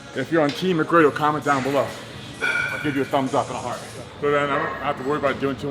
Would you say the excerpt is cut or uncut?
cut